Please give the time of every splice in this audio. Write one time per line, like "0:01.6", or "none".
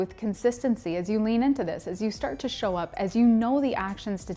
none